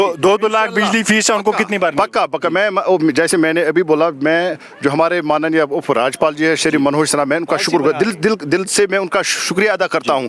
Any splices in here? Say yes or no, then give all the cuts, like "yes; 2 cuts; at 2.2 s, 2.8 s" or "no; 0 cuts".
no; 0 cuts